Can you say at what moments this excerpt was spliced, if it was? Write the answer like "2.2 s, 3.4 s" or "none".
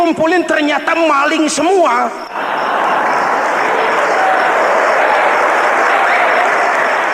2.3 s